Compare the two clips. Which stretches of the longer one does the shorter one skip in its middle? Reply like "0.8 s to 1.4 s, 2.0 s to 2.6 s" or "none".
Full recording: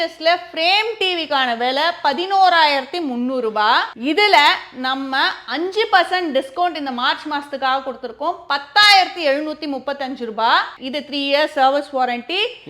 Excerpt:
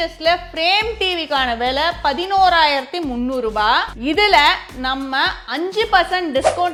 none